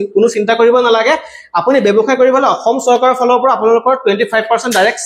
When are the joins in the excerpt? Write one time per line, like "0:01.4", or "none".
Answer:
none